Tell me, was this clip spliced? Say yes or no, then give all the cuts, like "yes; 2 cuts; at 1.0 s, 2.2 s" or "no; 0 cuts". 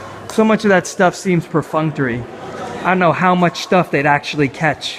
no; 0 cuts